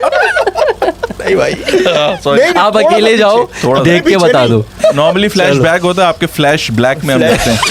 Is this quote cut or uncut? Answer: cut